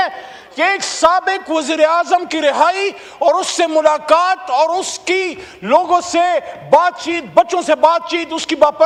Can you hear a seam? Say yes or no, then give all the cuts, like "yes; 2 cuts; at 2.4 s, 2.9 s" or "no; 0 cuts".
no; 0 cuts